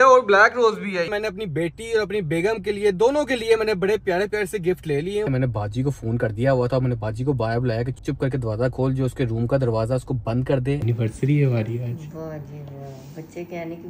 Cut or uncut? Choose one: cut